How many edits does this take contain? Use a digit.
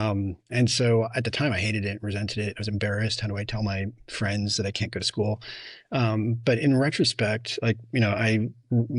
0